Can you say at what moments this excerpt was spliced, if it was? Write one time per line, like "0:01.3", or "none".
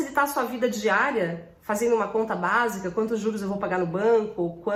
none